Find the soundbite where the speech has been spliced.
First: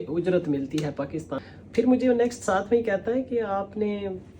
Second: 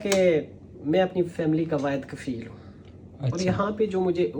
first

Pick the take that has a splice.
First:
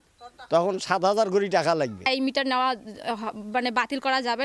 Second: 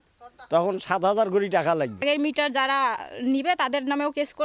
second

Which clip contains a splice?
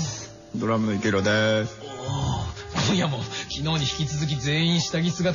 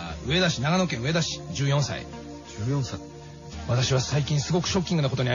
second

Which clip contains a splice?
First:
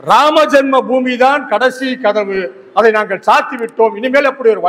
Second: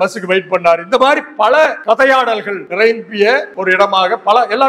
second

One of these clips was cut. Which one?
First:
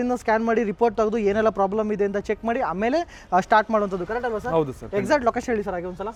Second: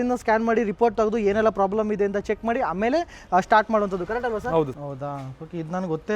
second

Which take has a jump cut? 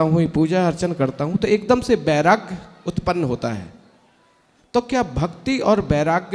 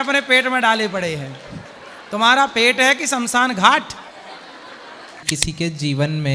second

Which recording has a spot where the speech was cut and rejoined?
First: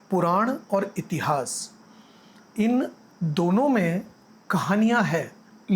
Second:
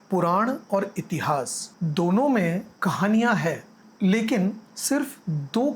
second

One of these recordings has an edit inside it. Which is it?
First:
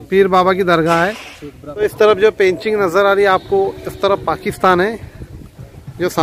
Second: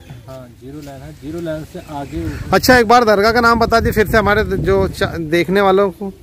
first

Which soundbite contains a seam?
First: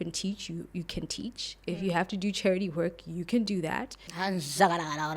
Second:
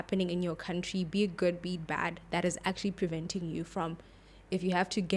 first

